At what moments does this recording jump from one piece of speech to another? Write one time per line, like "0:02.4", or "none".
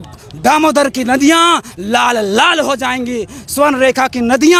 none